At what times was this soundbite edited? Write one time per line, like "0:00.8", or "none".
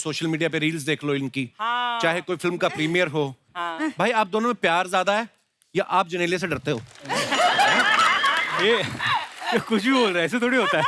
0:03.5

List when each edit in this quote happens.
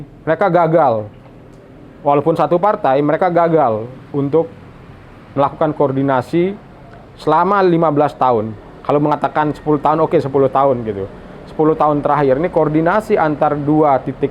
none

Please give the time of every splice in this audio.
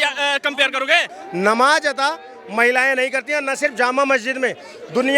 0:01.2

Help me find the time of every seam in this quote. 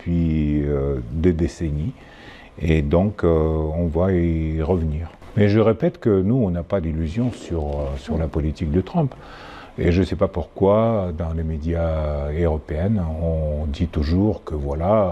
0:05.1

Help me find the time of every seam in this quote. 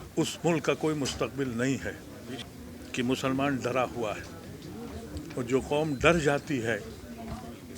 0:02.4

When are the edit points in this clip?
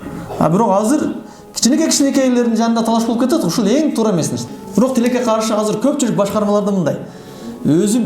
0:04.5

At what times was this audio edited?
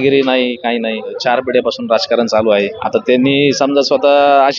0:01.2
0:02.8

